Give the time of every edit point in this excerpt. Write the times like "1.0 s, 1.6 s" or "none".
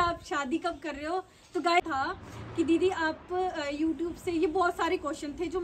1.8 s